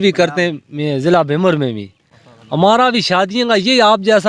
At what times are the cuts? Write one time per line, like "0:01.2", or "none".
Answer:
none